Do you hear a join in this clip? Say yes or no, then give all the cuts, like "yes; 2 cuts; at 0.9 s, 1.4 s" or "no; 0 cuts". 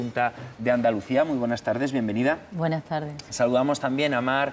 yes; 1 cut; at 1.8 s